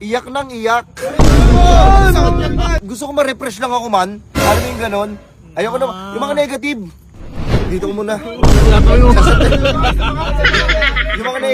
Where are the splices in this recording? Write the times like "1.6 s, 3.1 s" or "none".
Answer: 2.8 s